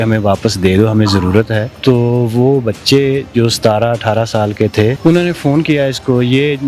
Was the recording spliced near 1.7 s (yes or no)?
yes